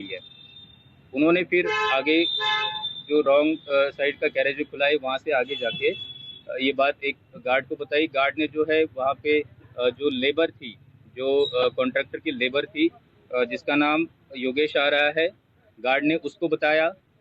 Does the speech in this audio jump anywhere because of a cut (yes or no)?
no